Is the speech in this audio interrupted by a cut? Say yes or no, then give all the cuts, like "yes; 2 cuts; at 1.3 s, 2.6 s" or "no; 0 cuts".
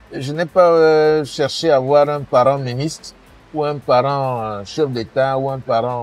no; 0 cuts